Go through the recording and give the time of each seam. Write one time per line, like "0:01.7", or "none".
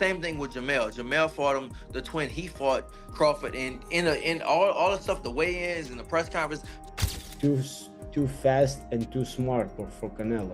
0:06.7